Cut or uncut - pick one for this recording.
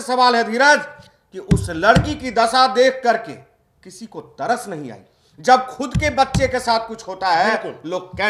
uncut